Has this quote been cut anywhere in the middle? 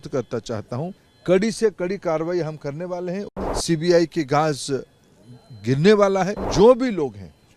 yes; 3 cuts; at 1.1 s, 3.3 s, 6.4 s

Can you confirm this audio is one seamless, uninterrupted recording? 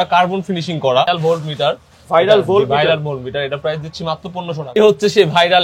no; 2 cuts; at 1.0 s, 4.6 s

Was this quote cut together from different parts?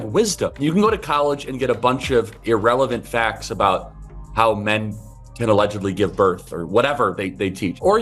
no; 0 cuts

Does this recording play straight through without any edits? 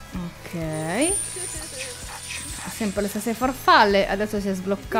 yes; 0 cuts

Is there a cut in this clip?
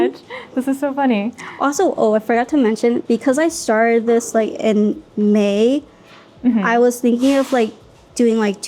no; 0 cuts

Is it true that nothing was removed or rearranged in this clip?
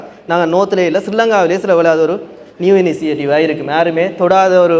yes; 0 cuts

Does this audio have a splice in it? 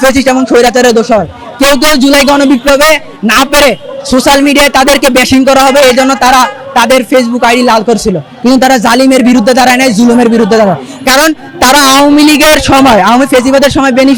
no; 0 cuts

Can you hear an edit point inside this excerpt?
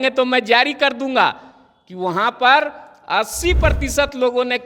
no; 0 cuts

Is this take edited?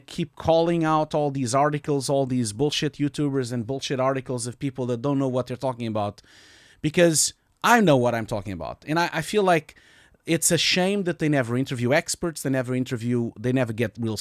no; 0 cuts

